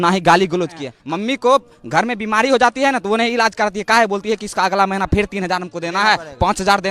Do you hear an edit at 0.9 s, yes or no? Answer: yes